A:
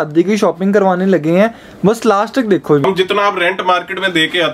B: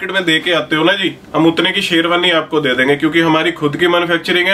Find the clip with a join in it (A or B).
A